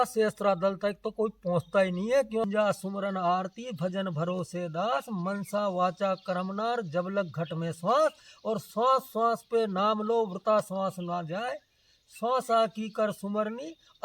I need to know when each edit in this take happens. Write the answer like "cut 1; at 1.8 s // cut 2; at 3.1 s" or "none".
cut 1; at 2.4 s